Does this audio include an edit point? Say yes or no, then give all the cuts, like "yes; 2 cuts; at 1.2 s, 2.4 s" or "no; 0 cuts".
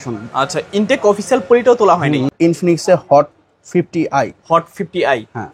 yes; 1 cut; at 2.3 s